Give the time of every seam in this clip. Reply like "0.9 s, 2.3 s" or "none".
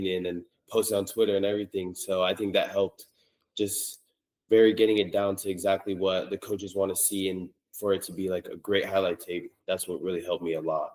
none